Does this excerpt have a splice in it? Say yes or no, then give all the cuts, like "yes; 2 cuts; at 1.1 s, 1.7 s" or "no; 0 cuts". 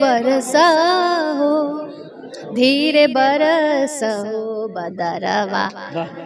no; 0 cuts